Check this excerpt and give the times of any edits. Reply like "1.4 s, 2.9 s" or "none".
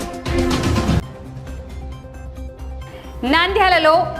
1.0 s